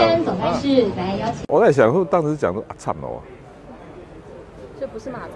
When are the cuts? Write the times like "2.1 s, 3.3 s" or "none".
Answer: 1.3 s